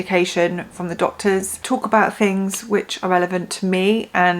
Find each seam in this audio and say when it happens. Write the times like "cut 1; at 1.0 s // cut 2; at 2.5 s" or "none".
cut 1; at 1.5 s